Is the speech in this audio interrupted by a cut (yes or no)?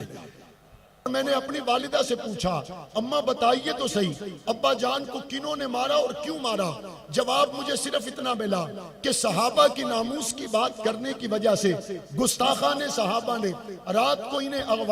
yes